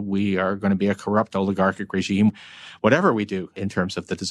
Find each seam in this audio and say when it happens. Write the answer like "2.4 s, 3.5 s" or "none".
2.3 s, 3.6 s